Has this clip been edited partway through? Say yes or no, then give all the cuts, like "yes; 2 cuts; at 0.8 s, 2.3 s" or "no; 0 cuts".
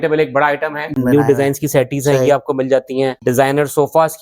yes; 2 cuts; at 0.9 s, 3.2 s